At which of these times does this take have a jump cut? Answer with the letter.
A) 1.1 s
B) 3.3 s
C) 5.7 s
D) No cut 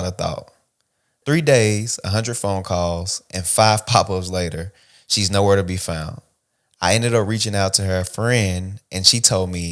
A